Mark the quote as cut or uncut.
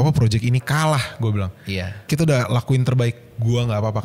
cut